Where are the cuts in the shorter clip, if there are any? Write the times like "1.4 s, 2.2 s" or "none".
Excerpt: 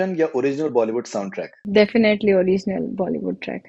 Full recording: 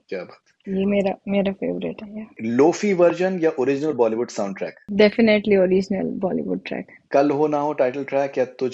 none